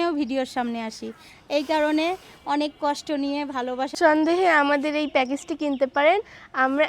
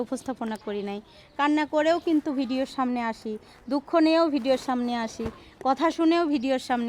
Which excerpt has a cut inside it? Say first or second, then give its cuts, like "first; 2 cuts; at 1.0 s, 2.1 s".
first; 1 cut; at 4.0 s